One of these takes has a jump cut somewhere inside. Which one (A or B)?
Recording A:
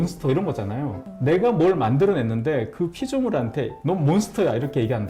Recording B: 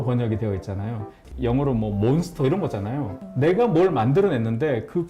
B